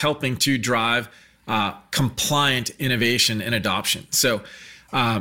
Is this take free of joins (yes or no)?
yes